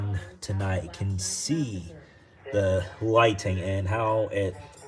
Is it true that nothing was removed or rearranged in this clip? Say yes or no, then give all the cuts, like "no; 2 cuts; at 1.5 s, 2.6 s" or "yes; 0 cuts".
yes; 0 cuts